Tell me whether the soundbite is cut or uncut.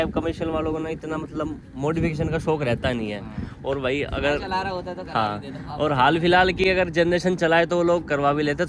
uncut